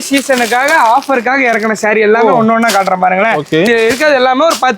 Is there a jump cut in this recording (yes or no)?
yes